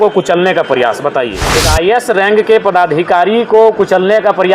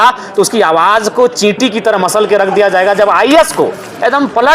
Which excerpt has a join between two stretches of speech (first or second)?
first